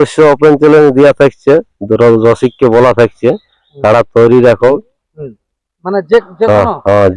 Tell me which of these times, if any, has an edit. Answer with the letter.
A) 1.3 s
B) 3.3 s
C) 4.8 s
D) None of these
C